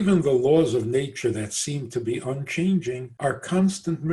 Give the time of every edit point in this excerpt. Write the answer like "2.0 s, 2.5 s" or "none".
3.1 s